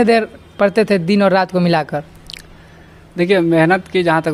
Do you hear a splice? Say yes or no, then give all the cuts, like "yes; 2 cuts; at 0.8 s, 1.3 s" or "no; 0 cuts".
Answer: no; 0 cuts